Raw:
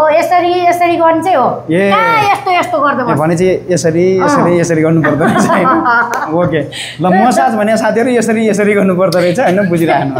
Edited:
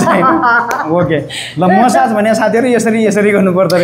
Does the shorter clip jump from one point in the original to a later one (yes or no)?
no